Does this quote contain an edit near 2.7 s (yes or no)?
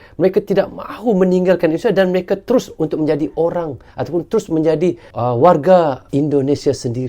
no